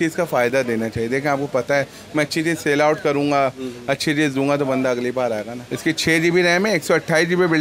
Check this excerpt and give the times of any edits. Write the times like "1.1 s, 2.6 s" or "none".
5.6 s